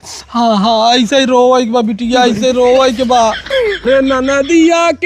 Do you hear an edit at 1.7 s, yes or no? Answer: no